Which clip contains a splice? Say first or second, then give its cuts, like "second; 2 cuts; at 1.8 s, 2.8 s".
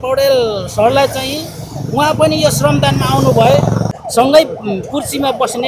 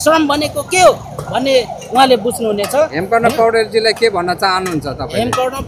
first; 1 cut; at 4.0 s